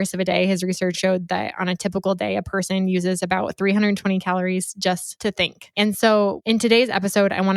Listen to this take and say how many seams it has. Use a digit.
3